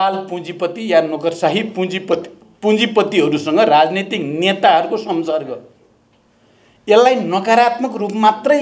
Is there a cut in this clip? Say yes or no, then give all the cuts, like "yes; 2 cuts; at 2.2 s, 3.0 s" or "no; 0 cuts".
no; 0 cuts